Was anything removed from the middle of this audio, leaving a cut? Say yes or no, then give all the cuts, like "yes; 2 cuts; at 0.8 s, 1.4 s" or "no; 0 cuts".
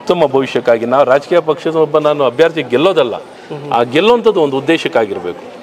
no; 0 cuts